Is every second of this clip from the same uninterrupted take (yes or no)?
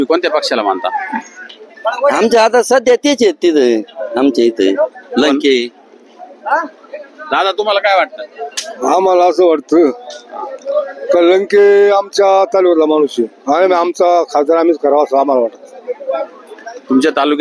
yes